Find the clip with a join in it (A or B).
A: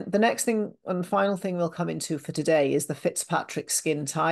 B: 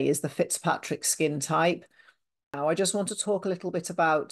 B